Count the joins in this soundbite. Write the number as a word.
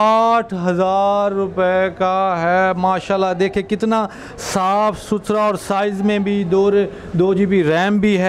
zero